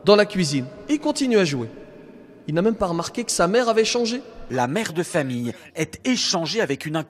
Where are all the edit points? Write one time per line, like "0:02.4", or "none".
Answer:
0:04.4

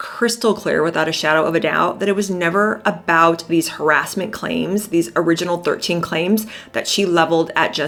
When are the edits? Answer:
none

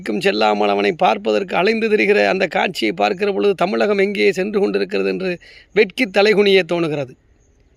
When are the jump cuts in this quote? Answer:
0:03.6

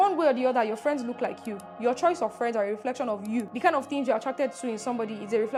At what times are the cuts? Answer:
none

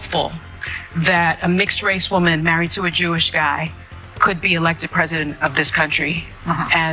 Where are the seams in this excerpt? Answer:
none

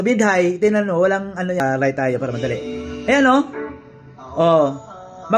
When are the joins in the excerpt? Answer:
0:01.6

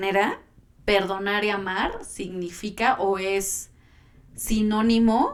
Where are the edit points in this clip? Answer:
none

